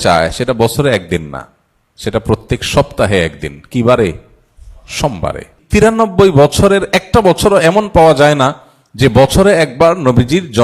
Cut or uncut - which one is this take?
cut